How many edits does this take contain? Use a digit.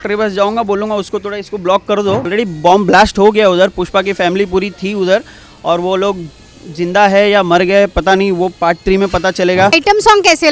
2